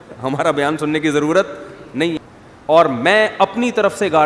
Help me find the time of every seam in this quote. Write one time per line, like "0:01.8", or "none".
0:02.2